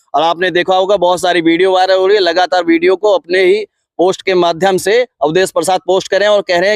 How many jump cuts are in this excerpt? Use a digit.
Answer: 0